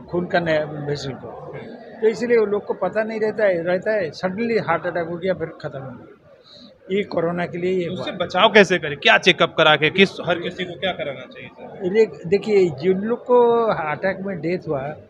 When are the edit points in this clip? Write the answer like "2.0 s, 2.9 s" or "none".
none